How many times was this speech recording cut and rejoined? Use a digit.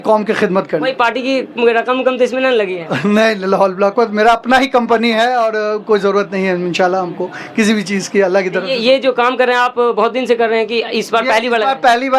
0